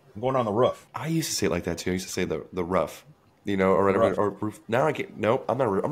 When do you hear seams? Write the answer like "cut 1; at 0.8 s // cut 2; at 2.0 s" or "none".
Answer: cut 1; at 0.9 s

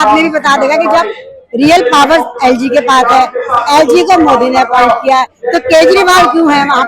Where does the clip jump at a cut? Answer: none

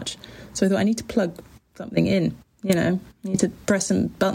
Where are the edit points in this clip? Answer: none

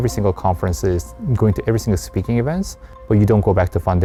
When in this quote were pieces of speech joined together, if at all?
none

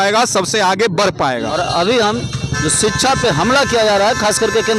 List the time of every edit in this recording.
cut 1; at 1.5 s

